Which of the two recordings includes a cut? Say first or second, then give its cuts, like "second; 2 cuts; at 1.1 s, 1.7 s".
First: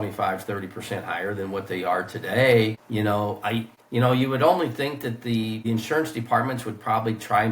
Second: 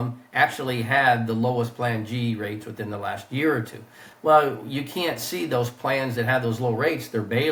first; 3 cuts; at 2.8 s, 3.8 s, 5.6 s